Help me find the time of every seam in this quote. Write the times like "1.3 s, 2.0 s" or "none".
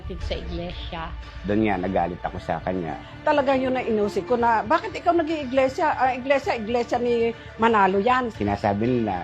8.3 s